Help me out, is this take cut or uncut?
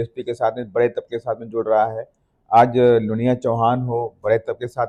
uncut